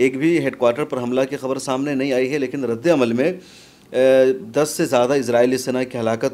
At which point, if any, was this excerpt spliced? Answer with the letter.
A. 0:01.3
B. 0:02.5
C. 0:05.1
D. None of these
D